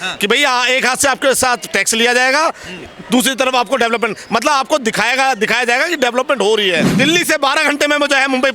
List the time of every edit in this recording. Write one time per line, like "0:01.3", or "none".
0:06.9